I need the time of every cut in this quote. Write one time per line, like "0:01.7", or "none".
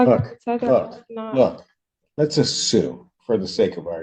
none